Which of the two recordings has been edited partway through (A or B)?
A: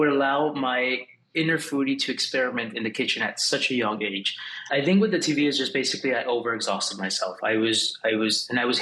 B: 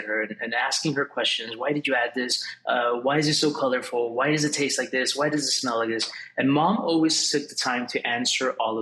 A